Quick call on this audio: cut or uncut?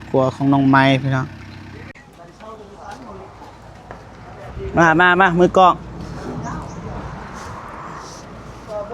cut